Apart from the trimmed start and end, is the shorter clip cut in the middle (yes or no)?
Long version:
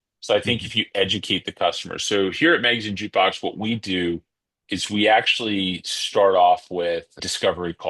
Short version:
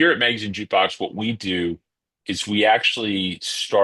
no